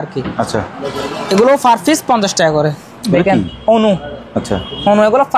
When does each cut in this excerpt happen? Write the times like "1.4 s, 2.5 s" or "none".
2.8 s